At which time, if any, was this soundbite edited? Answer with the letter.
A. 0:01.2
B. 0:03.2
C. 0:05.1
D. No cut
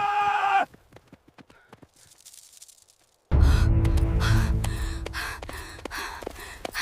B